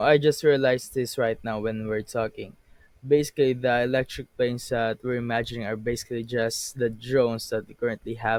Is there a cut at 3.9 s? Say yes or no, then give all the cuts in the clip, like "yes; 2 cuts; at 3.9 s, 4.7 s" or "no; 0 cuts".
no; 0 cuts